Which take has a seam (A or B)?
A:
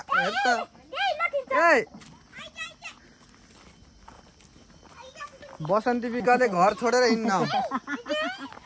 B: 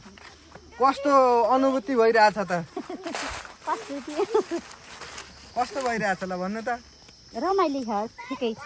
A